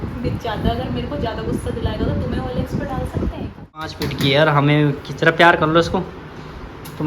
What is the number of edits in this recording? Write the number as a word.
one